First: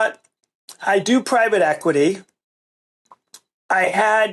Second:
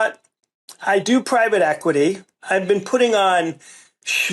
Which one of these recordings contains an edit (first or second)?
second